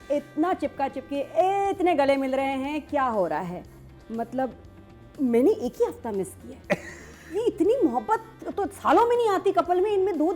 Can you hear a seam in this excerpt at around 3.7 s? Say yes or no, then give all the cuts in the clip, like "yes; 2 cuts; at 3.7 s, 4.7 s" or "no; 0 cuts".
no; 0 cuts